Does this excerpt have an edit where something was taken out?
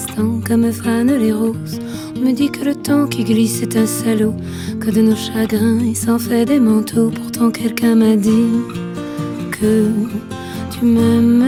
no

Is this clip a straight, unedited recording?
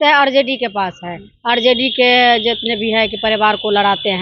yes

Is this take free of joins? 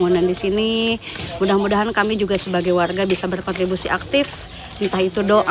yes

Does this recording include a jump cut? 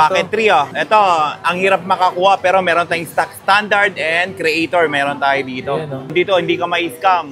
yes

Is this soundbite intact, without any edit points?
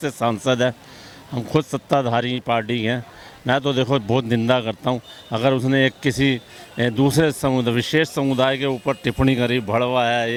yes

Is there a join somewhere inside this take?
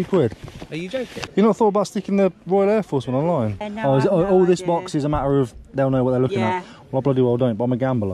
yes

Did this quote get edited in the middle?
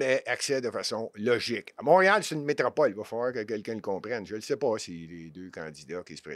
no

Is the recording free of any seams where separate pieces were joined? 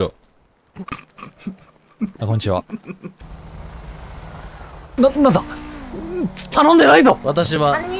no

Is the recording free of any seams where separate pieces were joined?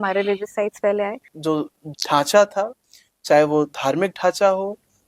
no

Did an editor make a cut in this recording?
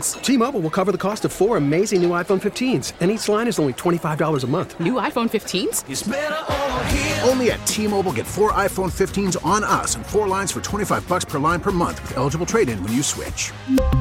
no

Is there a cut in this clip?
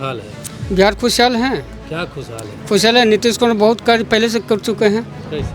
no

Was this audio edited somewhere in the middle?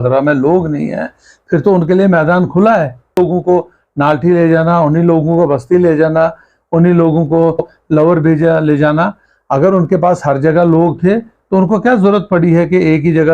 yes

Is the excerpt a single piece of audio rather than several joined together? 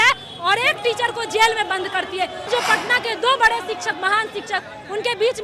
no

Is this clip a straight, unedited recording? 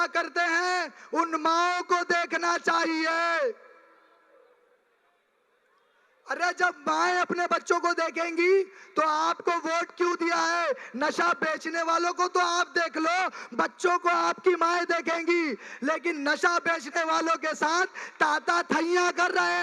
yes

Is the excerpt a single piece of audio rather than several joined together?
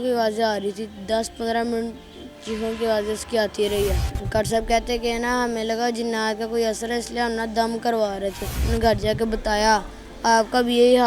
no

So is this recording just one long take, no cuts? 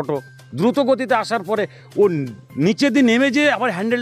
yes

